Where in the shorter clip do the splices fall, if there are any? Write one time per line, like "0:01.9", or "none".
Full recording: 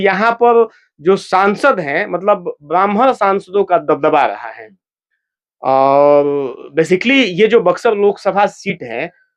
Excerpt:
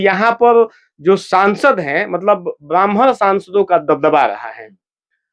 none